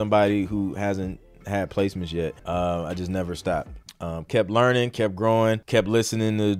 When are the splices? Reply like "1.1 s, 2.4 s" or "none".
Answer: 2.4 s, 3.8 s, 5.6 s